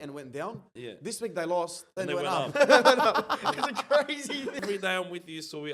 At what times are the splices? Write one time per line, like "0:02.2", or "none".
0:04.6